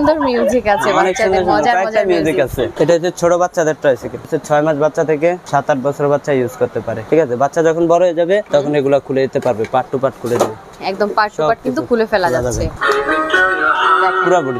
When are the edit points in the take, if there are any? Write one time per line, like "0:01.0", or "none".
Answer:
0:02.7
0:04.3
0:05.4
0:07.0
0:08.4
0:10.8
0:12.7